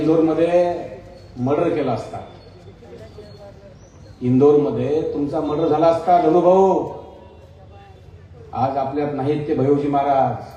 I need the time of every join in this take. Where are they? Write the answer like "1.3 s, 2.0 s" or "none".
none